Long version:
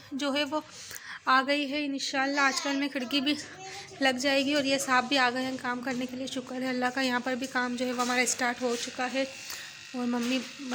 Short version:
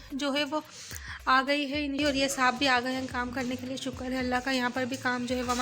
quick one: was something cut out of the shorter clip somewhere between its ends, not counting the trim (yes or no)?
yes